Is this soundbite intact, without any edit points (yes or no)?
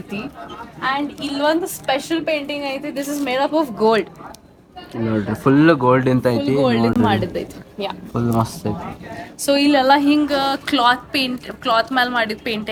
yes